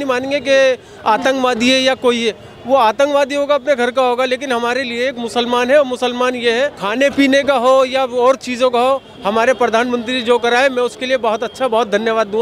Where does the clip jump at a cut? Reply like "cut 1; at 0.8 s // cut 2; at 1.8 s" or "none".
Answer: cut 1; at 6.8 s

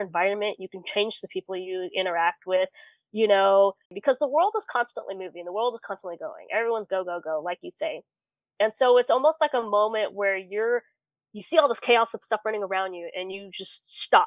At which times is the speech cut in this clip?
cut 1; at 3.9 s

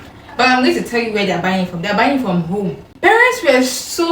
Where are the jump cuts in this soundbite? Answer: cut 1; at 2.8 s

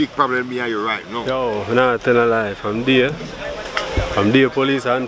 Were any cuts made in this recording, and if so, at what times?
cut 1; at 1.3 s

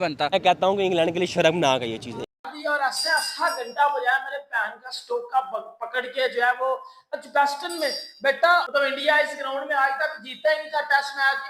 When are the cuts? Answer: cut 1; at 2.3 s // cut 2; at 8.7 s

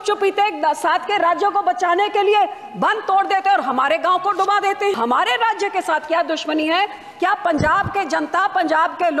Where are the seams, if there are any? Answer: cut 1; at 4.9 s

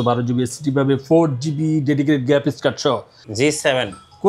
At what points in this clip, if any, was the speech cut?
cut 1; at 3.2 s

